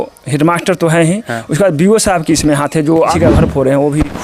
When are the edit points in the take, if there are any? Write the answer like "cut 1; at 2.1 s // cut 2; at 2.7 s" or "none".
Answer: cut 1; at 3.1 s